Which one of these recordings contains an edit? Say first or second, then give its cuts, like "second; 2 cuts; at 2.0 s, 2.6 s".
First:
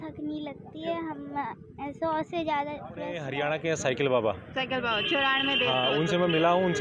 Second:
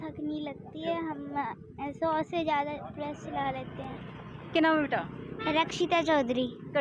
first; 1 cut; at 3.3 s